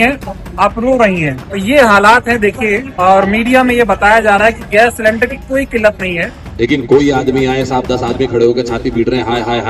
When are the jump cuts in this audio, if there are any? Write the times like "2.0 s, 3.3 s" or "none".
1.4 s, 2.9 s, 6.4 s